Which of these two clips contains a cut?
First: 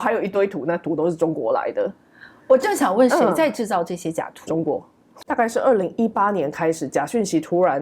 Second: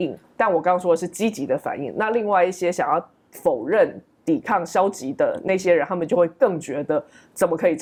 first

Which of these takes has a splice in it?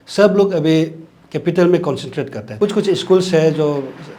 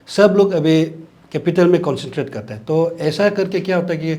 first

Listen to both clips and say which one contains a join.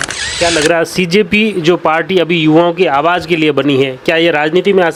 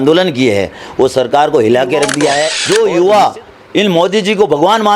second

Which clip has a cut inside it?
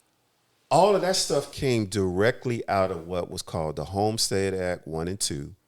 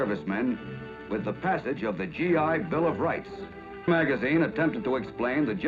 second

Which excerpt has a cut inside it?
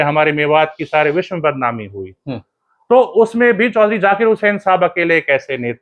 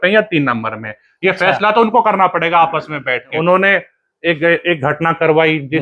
second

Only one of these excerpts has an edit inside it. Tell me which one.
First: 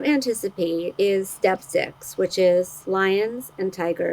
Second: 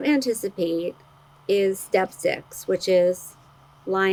first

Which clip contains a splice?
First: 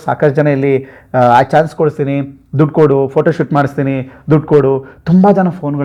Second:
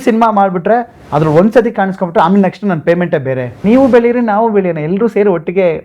second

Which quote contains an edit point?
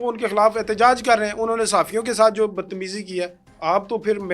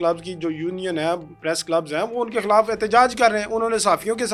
first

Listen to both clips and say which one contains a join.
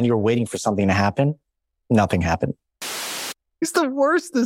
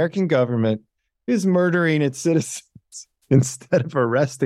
first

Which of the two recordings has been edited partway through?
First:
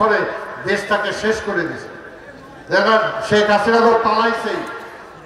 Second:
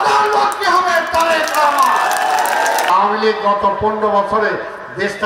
second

